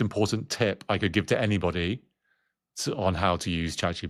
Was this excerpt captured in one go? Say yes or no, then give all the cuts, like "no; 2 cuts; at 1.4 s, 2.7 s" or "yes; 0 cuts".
yes; 0 cuts